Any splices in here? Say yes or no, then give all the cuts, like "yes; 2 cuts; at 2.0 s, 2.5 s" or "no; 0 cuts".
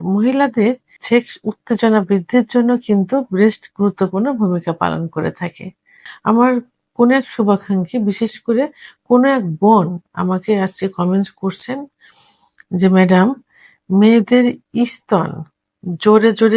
yes; 2 cuts; at 0.9 s, 6.0 s